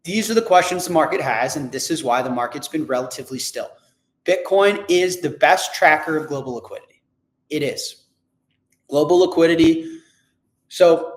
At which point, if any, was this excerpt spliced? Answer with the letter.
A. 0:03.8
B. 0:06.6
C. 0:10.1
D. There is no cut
D